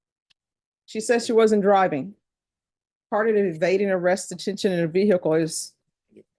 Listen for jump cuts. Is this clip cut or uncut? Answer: uncut